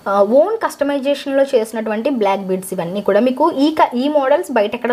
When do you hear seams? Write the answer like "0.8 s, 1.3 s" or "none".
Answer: none